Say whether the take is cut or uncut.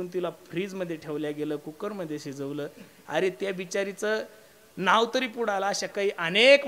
uncut